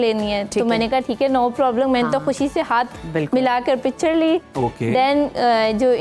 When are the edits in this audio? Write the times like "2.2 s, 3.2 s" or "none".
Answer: none

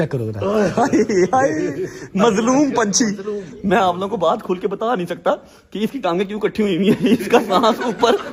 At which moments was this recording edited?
none

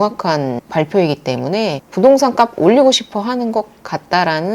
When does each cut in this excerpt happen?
1.8 s

